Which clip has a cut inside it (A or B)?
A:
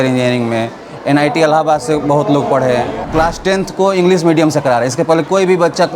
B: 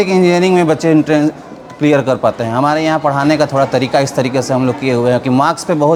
A